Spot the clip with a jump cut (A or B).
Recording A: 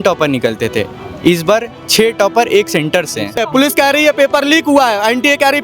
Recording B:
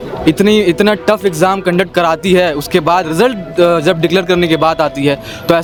A